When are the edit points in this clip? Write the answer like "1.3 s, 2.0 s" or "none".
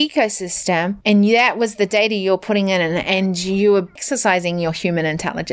1.0 s, 4.0 s

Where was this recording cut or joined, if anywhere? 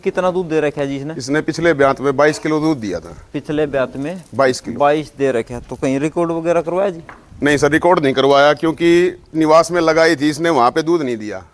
none

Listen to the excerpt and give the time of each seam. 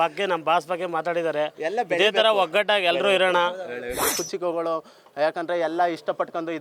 4.1 s

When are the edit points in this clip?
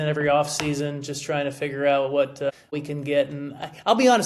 2.7 s

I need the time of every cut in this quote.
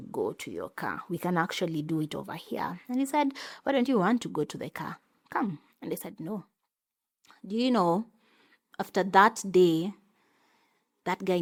none

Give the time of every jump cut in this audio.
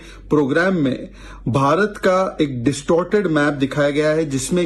none

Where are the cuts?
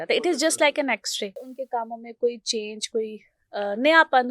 1.5 s

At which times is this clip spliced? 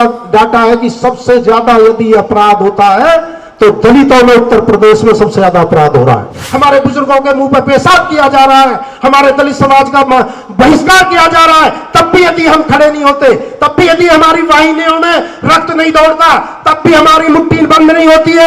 6.4 s

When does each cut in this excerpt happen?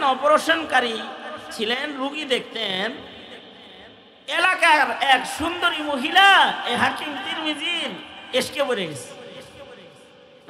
none

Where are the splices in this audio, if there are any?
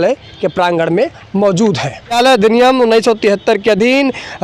2.2 s

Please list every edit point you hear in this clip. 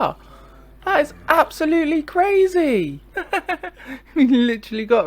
3.1 s

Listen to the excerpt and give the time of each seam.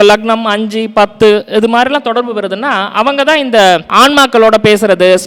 none

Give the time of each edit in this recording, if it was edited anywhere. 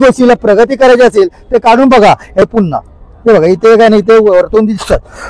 2.4 s

